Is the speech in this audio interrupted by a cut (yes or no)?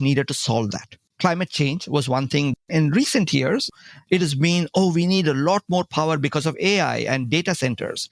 yes